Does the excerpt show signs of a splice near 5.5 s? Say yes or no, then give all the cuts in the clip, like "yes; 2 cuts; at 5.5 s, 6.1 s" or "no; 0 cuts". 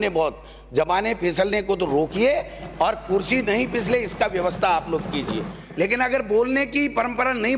yes; 1 cut; at 5.5 s